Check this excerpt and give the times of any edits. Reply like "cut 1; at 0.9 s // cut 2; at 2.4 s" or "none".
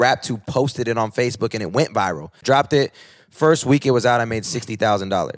cut 1; at 2.4 s